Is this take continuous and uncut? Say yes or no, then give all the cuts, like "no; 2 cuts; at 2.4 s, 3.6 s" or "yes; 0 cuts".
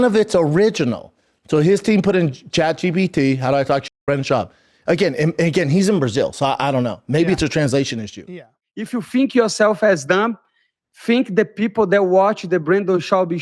no; 1 cut; at 8.6 s